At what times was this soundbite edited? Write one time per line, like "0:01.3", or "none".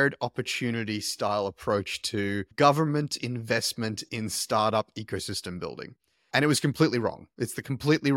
none

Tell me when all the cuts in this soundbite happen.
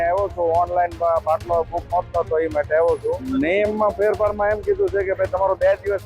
0:03.2

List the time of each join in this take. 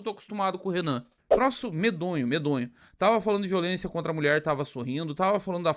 0:01.2

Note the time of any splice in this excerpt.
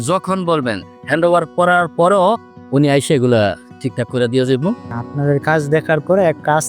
0:04.9

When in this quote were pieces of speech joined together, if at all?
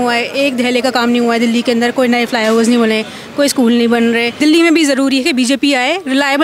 0:04.3

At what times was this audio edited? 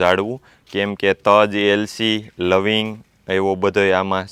none

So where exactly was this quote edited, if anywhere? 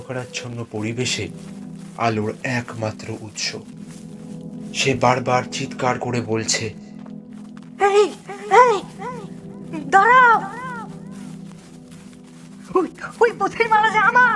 0:03.6
0:04.7

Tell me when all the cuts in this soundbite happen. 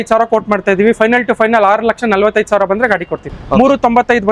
0:03.3

